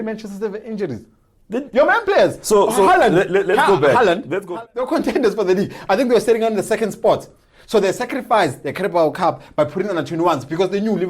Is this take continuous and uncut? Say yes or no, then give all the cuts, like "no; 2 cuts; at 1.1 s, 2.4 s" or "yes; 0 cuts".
no; 1 cut; at 4.3 s